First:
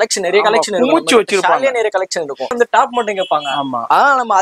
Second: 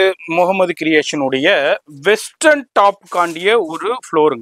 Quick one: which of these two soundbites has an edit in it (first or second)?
first